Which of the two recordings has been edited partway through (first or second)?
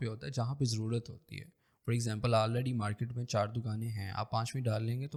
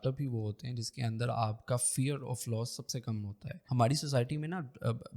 second